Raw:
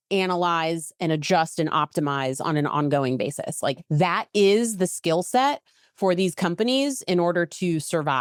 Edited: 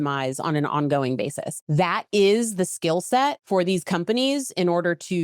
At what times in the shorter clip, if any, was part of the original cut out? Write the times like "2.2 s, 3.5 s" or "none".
1.6 s, 3.4 s